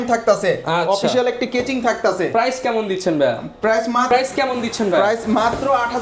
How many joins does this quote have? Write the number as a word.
zero